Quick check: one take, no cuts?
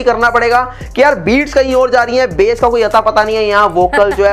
yes; 0 cuts

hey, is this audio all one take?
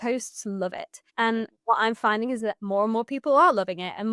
no; 2 cuts; at 1.4 s, 2.6 s

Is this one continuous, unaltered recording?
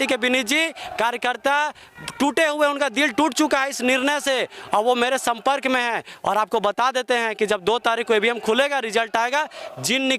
yes; 0 cuts

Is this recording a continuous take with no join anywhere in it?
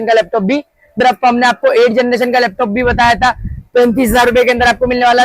no; 1 cut; at 1.0 s

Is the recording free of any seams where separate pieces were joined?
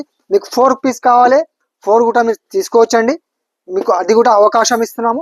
yes; 0 cuts

